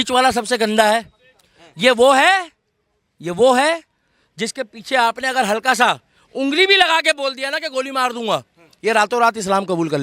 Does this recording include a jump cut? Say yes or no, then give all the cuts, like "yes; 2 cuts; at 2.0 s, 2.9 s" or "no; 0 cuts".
no; 0 cuts